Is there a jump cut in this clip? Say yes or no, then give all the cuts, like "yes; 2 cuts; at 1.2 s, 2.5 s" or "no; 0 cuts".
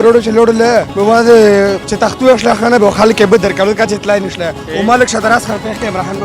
yes; 2 cuts; at 0.9 s, 1.9 s